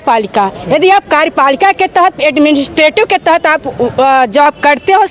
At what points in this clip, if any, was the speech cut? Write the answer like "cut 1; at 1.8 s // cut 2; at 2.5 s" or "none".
none